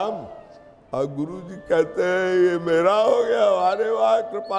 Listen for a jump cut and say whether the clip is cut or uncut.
uncut